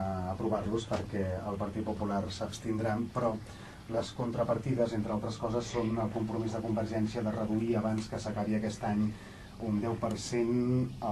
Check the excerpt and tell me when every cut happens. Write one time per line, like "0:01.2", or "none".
none

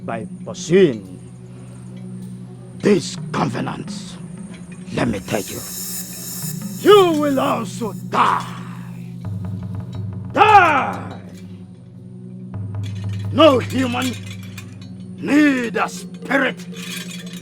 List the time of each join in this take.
0:13.1

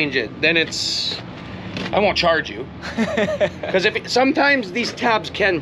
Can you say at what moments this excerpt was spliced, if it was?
none

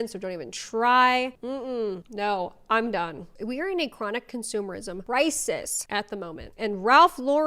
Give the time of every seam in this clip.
0:03.2
0:05.0
0:05.8

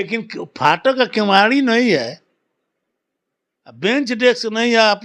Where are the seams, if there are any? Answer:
none

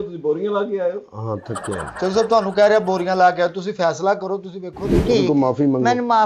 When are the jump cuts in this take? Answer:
0:04.9

